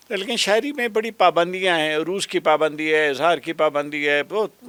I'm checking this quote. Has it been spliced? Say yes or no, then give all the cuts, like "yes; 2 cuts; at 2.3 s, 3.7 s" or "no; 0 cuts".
no; 0 cuts